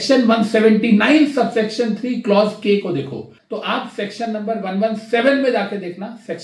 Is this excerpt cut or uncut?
cut